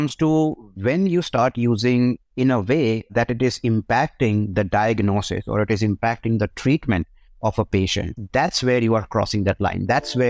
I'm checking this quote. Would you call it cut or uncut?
uncut